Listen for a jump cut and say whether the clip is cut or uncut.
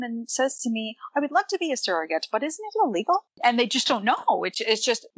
cut